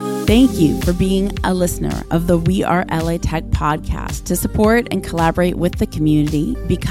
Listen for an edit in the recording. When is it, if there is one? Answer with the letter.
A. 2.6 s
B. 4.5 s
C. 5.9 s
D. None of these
D